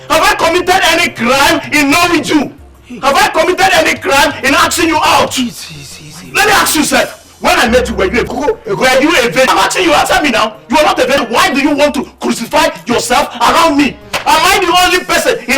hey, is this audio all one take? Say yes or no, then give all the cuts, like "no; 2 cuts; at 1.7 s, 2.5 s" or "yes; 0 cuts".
no; 3 cuts; at 8.3 s, 9.5 s, 11.2 s